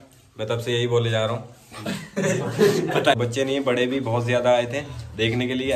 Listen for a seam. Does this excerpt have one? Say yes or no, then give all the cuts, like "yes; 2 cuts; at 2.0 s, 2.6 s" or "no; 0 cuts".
yes; 1 cut; at 3.2 s